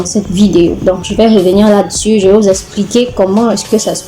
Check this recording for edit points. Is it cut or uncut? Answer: uncut